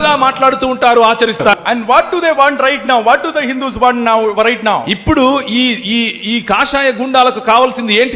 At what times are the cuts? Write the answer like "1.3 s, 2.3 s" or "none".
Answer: 1.5 s